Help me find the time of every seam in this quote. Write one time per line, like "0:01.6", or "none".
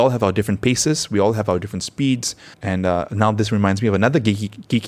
0:02.5